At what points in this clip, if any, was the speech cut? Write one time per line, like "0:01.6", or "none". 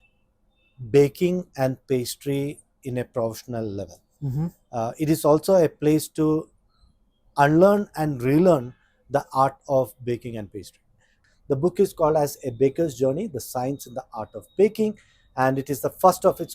0:11.3